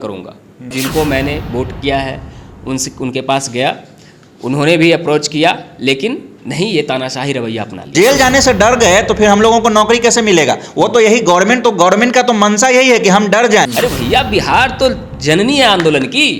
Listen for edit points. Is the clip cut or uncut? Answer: cut